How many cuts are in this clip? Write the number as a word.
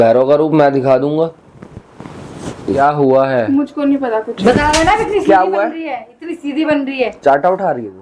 one